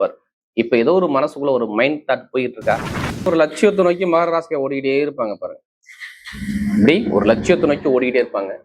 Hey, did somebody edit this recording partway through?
yes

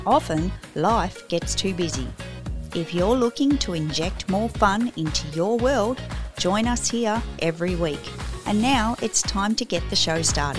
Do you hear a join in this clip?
yes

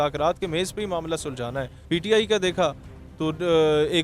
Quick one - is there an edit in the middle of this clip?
yes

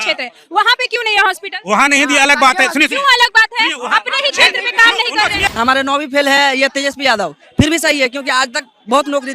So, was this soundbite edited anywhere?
yes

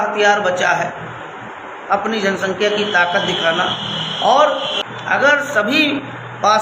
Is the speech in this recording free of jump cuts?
no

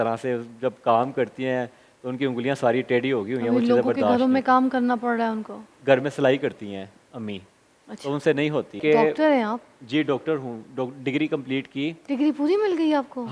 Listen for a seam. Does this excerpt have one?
yes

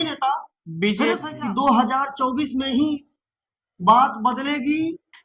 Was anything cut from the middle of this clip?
yes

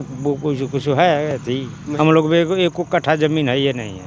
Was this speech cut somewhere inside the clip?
yes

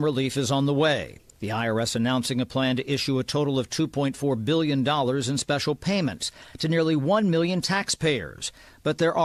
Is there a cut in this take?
no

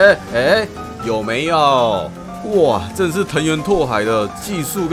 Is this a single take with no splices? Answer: yes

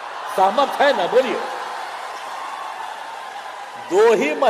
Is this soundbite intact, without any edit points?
yes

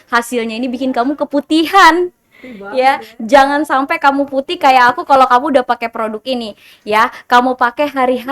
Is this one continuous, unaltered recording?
yes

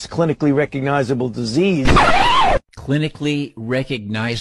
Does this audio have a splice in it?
no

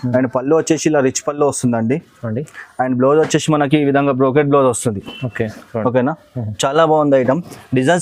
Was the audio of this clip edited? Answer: no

